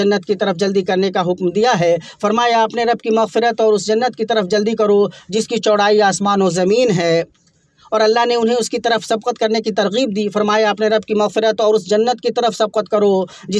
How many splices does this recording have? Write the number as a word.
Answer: zero